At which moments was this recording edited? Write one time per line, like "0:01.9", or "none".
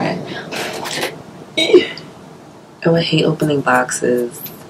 none